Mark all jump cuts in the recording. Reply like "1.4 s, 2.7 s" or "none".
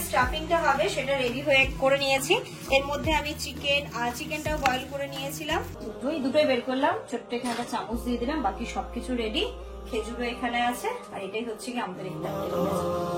5.8 s